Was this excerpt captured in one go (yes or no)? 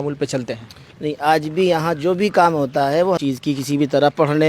no